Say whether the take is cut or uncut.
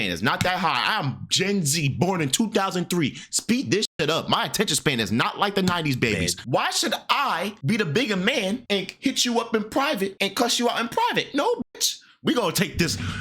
cut